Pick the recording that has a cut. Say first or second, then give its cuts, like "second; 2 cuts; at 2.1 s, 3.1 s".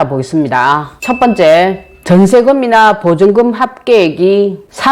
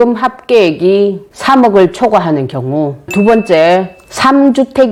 first; 1 cut; at 0.9 s